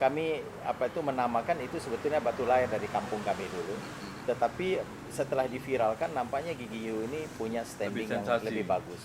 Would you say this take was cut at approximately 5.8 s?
no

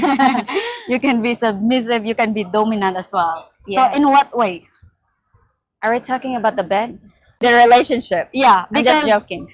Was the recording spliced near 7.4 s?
yes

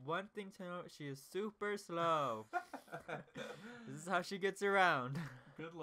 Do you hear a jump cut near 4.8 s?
no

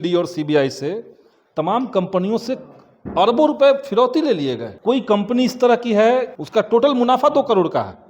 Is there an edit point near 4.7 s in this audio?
yes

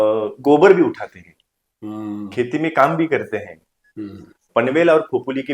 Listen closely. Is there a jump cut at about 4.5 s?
yes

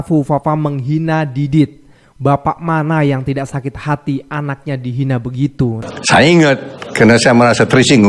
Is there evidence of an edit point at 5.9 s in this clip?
yes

